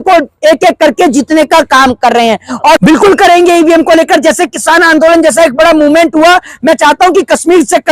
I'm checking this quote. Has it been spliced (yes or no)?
yes